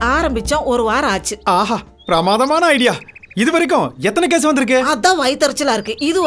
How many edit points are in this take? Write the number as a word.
zero